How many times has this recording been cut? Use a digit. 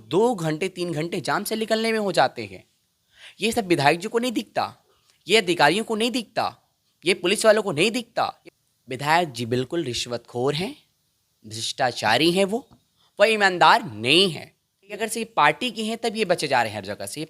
2